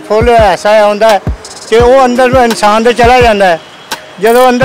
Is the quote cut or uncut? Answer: uncut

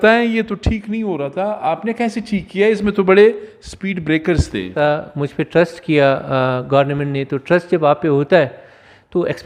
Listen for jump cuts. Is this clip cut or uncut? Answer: cut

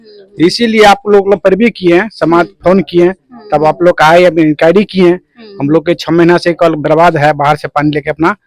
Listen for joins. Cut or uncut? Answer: uncut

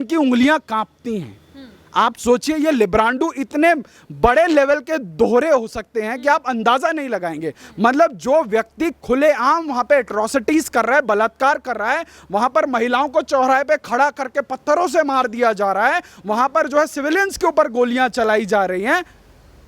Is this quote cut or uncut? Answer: uncut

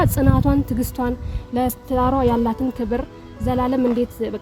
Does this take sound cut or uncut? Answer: uncut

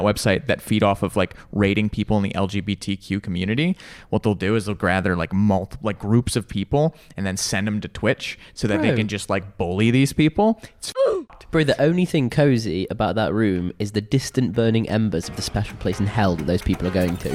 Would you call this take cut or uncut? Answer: uncut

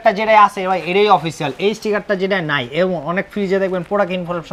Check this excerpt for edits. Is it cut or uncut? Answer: uncut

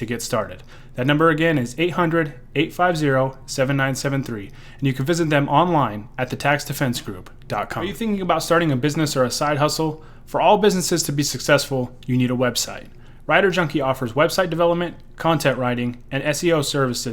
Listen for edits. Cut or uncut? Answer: cut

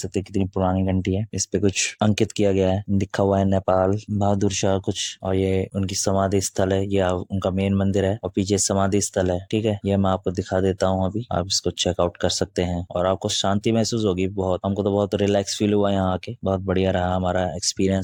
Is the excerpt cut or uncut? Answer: uncut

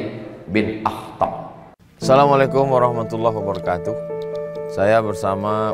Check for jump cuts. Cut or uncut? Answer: cut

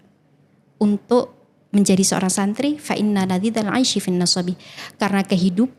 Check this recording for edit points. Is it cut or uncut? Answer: uncut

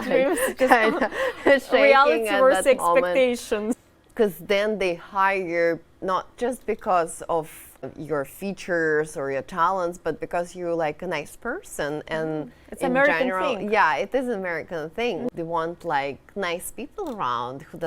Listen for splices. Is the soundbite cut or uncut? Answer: cut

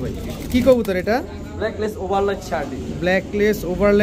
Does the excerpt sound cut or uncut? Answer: uncut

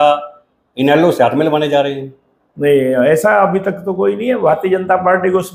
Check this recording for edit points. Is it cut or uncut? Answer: uncut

